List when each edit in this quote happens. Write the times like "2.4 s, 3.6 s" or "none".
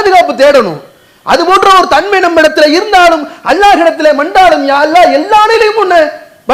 none

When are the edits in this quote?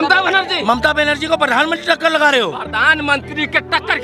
2.6 s

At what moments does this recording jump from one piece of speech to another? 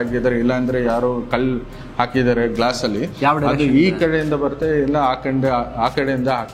none

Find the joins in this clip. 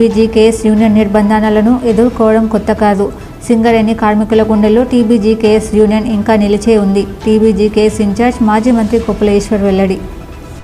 none

